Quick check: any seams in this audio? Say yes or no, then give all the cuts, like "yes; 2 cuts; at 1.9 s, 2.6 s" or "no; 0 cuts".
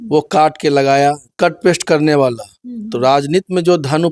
yes; 1 cut; at 1.3 s